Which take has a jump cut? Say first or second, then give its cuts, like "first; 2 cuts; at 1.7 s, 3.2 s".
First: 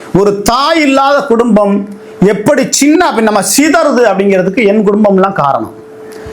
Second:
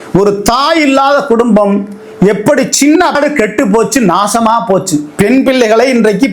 second; 1 cut; at 3.1 s